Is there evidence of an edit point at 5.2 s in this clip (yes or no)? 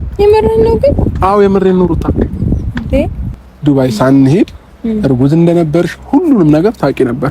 no